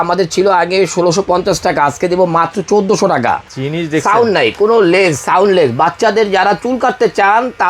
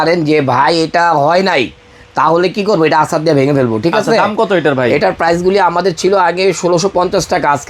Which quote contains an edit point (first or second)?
first